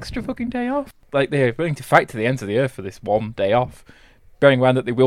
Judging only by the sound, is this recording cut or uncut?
cut